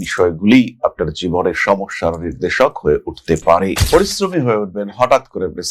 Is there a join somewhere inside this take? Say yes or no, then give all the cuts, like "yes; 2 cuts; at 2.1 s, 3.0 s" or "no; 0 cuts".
yes; 1 cut; at 3.7 s